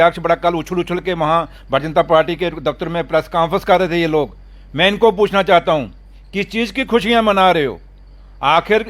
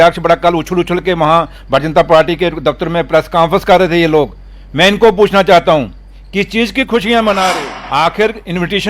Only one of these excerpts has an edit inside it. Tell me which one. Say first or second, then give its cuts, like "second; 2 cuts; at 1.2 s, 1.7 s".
second; 1 cut; at 7.7 s